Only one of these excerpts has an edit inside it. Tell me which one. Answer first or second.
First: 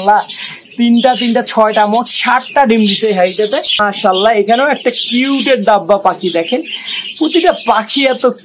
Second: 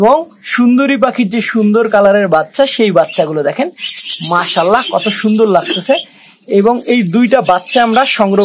first